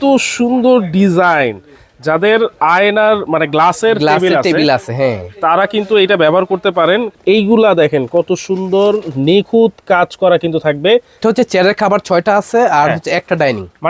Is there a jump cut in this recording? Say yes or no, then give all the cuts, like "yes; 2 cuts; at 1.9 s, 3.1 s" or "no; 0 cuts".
yes; 2 cuts; at 7.1 s, 11.1 s